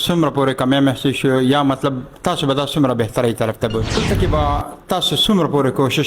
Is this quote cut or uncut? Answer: cut